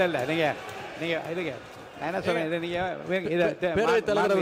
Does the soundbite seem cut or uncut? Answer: uncut